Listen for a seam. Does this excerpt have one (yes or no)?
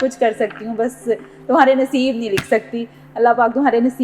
no